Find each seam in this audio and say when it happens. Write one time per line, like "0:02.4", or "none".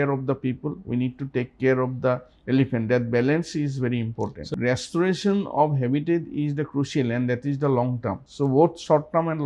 0:04.5
0:08.2